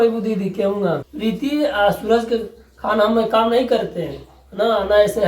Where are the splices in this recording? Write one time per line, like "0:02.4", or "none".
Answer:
0:01.1